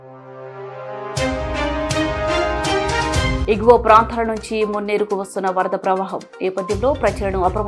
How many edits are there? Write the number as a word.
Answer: one